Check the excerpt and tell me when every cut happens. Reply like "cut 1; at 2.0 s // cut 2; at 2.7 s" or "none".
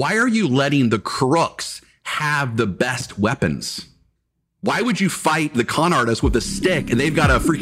none